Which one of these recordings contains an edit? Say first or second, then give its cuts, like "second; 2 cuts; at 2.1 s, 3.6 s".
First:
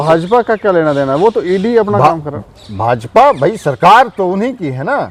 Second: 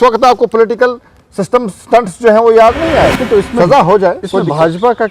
second; 1 cut; at 3.1 s